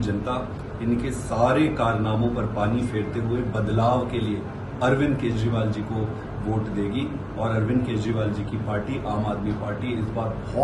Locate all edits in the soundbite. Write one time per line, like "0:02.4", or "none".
none